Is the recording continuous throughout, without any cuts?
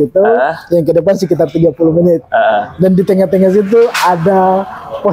yes; 0 cuts

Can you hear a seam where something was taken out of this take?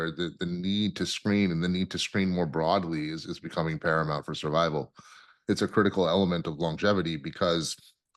no; 0 cuts

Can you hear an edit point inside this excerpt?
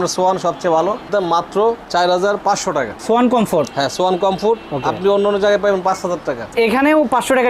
yes; 3 cuts; at 1.1 s, 2.9 s, 6.5 s

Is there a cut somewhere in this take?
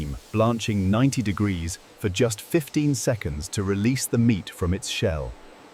no; 0 cuts

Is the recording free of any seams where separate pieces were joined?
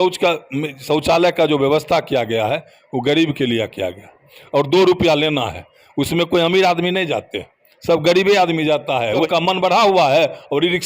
no; 1 cut; at 9.2 s

